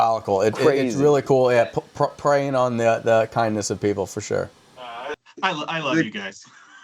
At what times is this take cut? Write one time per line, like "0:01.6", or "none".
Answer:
none